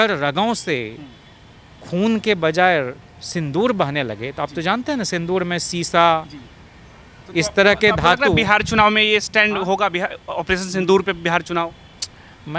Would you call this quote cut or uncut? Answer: uncut